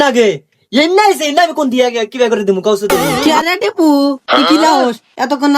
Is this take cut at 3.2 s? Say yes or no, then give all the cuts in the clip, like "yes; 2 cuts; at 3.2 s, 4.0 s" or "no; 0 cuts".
yes; 1 cut; at 3.2 s